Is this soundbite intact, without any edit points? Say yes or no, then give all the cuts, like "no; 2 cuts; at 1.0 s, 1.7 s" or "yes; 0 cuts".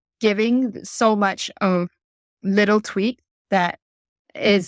yes; 0 cuts